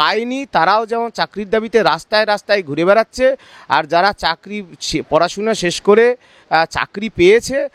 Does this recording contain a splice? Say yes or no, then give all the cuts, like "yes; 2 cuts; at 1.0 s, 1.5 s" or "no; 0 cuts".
no; 0 cuts